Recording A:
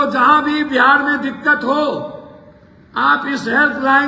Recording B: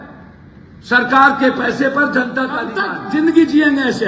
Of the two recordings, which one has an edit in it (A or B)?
B